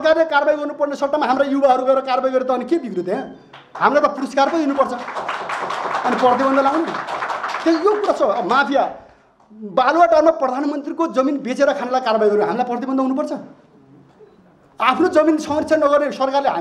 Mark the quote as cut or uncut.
uncut